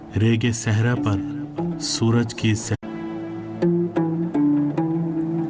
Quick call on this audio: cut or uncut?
uncut